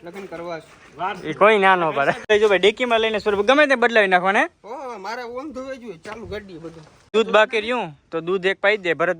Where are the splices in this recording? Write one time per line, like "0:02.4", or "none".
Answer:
0:02.2
0:07.1